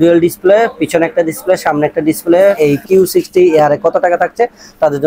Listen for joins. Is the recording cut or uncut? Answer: cut